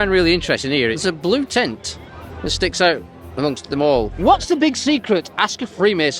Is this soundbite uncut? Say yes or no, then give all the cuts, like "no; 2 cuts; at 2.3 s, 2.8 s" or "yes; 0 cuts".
no; 2 cuts; at 1.0 s, 4.1 s